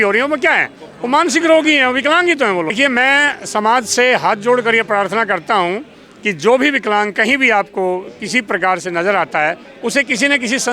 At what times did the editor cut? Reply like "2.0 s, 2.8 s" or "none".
2.7 s

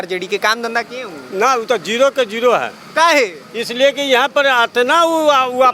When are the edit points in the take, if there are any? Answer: none

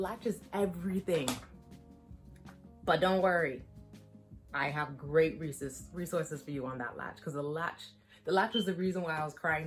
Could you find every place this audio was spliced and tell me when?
none

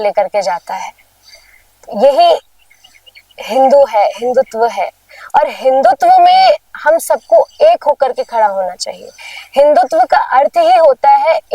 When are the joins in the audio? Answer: none

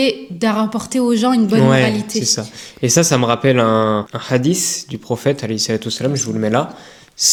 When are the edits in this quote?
none

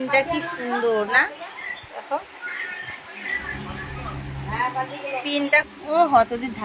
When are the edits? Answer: 5.7 s

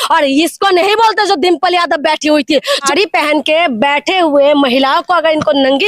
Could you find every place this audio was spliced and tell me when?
2.9 s

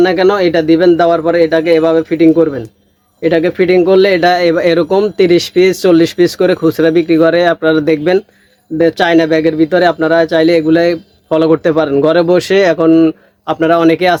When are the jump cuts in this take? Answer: none

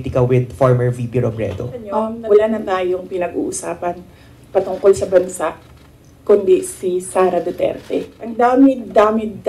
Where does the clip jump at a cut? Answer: 2.2 s, 8.2 s

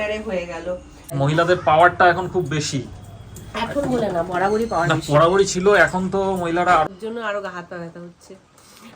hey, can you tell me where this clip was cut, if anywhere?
1.1 s, 6.9 s

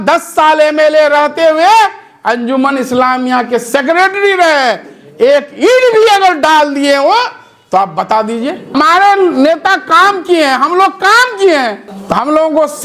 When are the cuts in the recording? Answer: 8.7 s, 11.9 s

